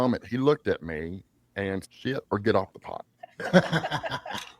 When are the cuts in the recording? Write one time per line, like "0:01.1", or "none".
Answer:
0:01.8